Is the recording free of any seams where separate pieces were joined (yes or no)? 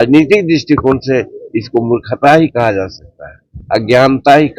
yes